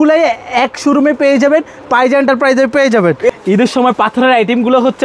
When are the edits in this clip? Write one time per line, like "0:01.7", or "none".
0:03.3